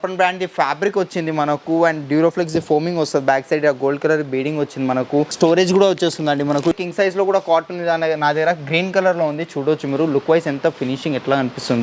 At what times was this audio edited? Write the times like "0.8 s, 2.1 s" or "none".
5.3 s, 6.7 s